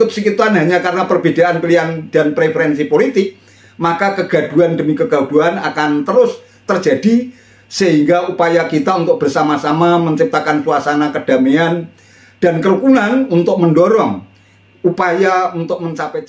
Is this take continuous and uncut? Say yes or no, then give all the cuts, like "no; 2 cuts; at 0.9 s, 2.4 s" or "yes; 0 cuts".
yes; 0 cuts